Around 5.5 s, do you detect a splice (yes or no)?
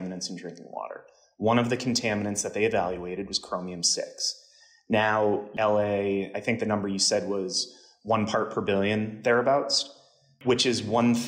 yes